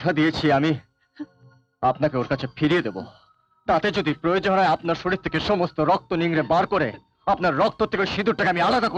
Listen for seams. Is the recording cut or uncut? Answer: uncut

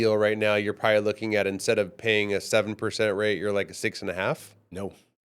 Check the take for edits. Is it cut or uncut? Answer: uncut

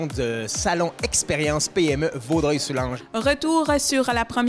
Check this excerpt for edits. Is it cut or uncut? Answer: cut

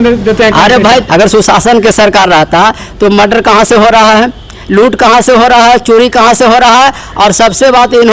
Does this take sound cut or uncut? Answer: cut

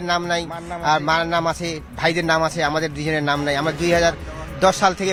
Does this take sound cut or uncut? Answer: uncut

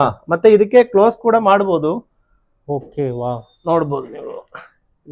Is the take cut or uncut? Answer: uncut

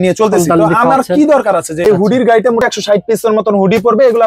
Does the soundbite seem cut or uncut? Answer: cut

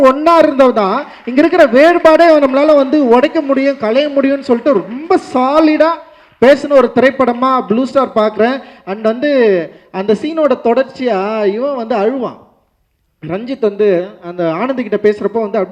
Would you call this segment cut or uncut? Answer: uncut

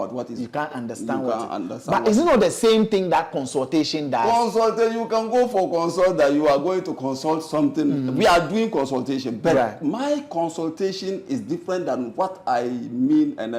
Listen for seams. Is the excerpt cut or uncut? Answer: uncut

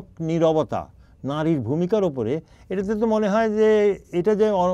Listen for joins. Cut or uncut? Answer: uncut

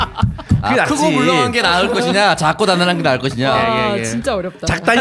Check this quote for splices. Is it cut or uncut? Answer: uncut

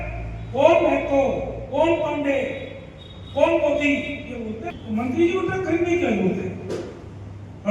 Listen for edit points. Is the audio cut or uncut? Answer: cut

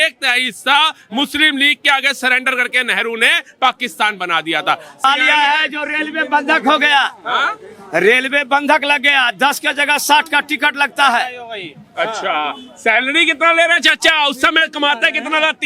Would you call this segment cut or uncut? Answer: cut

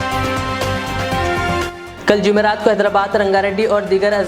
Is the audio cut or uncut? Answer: cut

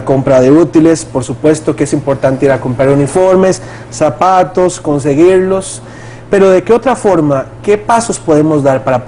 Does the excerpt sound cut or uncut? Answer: uncut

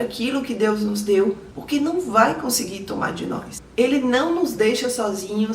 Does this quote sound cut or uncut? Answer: cut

